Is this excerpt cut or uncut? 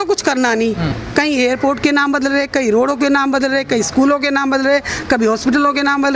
cut